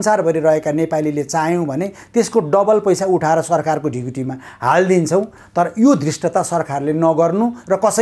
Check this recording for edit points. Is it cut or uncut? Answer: uncut